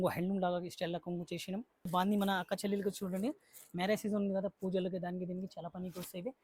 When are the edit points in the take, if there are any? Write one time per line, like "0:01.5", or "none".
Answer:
0:01.9

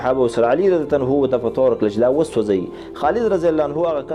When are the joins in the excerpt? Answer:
none

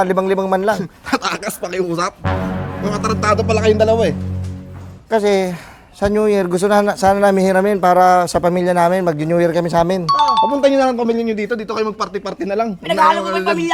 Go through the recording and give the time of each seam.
none

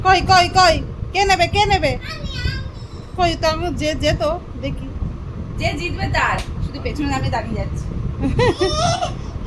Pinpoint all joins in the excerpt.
none

